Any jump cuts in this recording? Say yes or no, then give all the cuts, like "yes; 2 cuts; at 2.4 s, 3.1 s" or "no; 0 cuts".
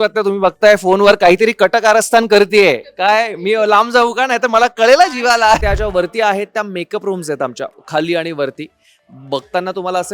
yes; 1 cut; at 5.6 s